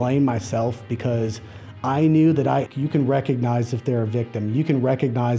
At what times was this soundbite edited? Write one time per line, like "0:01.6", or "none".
0:02.7